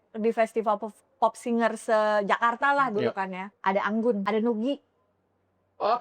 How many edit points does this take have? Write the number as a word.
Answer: two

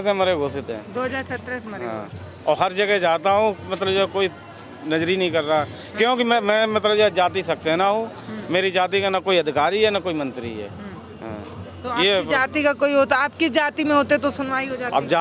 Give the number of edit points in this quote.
zero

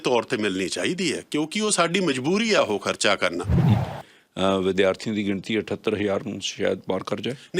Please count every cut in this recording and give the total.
one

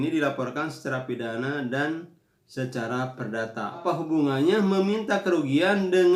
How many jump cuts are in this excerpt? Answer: one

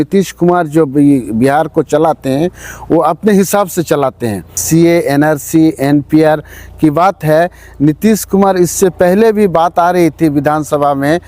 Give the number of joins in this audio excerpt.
one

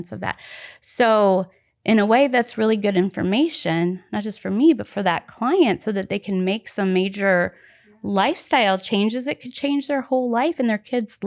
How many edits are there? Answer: zero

